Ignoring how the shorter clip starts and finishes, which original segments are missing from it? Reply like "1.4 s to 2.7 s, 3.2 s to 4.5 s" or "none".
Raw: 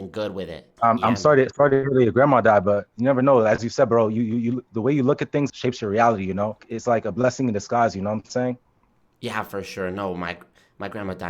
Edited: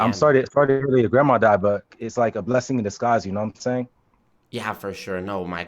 2.9 s to 6.6 s